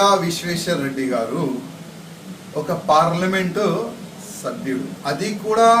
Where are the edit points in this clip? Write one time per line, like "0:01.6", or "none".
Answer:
0:01.2